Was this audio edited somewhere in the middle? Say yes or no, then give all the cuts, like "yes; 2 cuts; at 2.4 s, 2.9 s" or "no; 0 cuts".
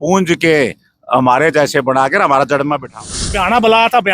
yes; 1 cut; at 3.2 s